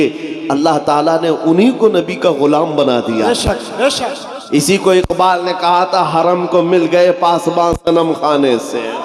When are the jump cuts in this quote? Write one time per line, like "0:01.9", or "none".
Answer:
none